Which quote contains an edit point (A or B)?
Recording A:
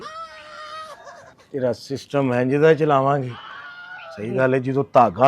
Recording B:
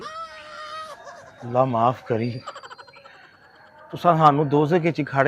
A